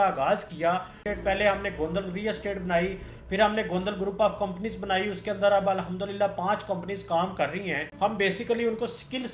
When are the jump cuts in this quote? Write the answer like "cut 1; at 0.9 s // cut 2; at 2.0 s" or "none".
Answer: cut 1; at 1.0 s // cut 2; at 7.9 s